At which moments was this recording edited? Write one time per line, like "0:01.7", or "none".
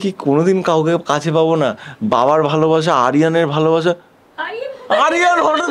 none